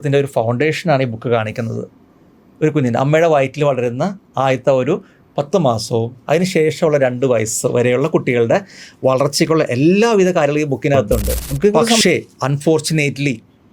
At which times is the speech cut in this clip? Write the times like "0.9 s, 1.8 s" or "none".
12.0 s